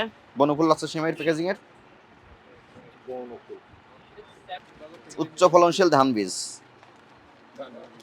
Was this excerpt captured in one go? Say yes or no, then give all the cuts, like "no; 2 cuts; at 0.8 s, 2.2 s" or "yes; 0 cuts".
no; 1 cut; at 4.7 s